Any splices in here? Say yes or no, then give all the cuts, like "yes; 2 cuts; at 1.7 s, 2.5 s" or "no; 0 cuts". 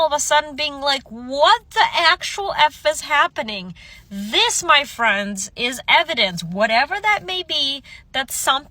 no; 0 cuts